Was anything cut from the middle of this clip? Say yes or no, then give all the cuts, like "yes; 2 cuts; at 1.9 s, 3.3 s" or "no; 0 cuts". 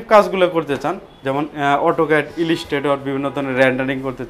no; 0 cuts